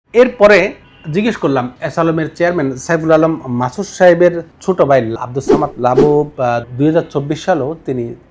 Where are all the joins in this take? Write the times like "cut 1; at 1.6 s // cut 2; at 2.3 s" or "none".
none